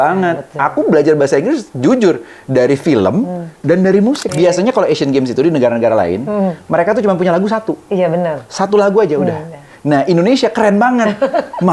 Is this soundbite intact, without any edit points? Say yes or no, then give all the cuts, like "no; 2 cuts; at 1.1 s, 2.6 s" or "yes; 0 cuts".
no; 1 cut; at 4.4 s